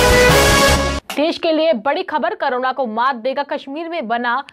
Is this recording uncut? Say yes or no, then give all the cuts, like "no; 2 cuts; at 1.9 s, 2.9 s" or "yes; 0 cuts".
no; 1 cut; at 0.9 s